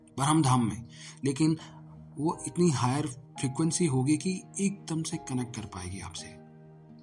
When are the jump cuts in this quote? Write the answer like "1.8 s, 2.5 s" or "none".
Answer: 6.1 s